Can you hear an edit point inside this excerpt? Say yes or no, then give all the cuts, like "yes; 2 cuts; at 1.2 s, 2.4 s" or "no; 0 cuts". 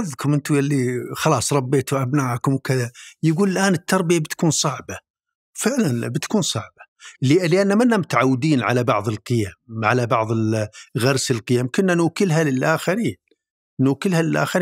no; 0 cuts